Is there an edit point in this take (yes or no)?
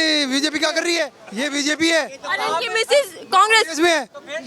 yes